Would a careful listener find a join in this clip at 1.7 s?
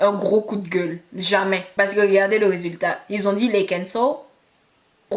yes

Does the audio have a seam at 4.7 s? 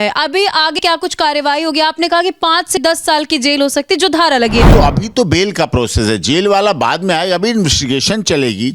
yes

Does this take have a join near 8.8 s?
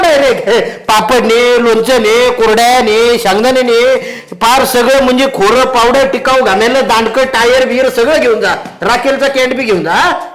no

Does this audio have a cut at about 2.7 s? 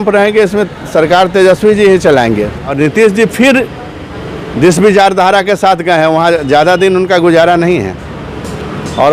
yes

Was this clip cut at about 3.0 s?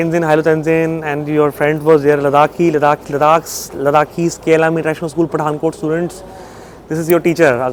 no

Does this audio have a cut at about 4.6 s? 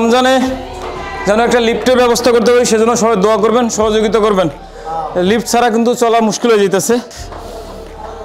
no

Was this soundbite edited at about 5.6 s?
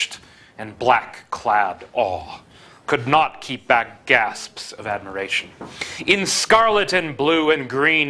no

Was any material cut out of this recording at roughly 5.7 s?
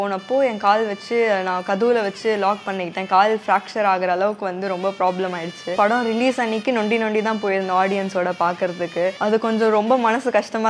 yes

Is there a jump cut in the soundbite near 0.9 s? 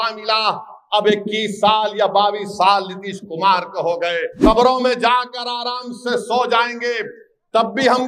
no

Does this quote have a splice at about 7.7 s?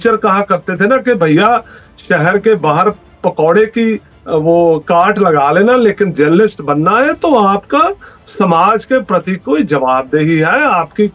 no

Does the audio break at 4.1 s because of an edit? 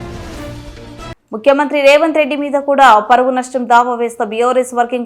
no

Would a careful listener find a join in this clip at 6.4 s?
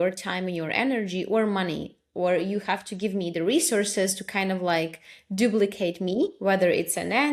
no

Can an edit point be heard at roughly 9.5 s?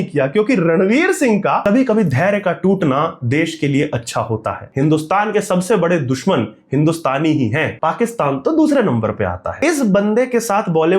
yes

